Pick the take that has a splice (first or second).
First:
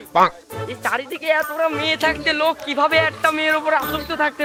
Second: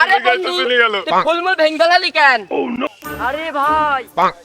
second